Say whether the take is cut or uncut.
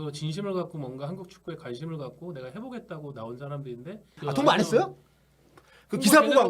cut